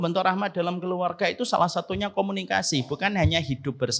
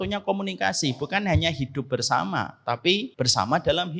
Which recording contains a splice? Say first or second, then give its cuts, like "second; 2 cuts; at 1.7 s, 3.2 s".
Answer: second; 1 cut; at 3.1 s